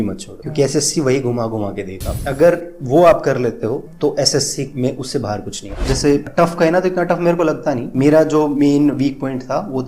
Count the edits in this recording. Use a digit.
2